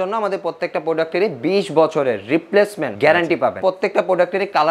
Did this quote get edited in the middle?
yes; 1 cut; at 3.1 s

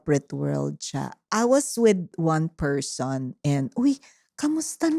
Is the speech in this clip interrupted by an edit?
yes; 1 cut; at 1.2 s

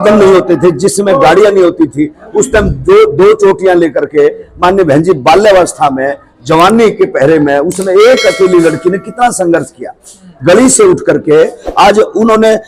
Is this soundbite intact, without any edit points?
yes; 0 cuts

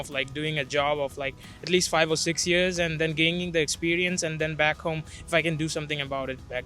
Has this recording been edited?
no; 0 cuts

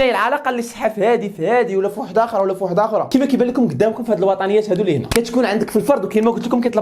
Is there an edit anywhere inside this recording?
no; 0 cuts

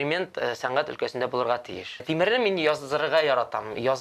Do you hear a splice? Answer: yes; 1 cut; at 2.0 s

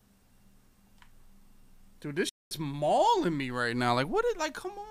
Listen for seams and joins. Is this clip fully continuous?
yes; 0 cuts

